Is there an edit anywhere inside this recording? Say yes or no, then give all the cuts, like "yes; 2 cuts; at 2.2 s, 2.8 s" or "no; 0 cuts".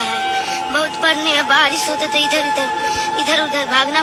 no; 0 cuts